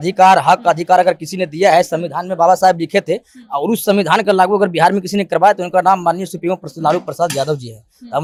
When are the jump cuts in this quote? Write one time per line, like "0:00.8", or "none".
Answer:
none